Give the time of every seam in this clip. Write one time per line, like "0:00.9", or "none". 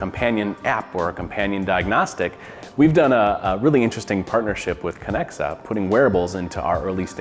0:02.5